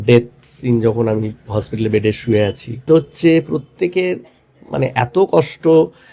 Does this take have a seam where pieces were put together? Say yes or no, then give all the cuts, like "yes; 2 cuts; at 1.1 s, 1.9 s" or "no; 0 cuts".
yes; 1 cut; at 2.9 s